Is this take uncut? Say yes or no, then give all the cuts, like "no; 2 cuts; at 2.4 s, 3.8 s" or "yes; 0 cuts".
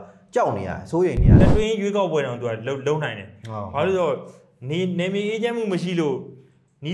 no; 1 cut; at 1.3 s